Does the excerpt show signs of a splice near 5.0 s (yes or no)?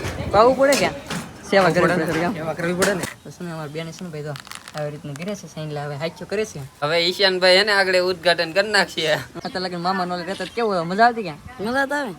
no